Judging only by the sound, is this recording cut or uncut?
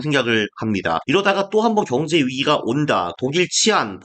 cut